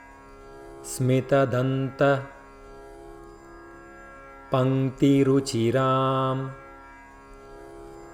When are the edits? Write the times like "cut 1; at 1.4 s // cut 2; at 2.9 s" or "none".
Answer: cut 1; at 1.0 s // cut 2; at 2.9 s // cut 3; at 4.5 s // cut 4; at 6.6 s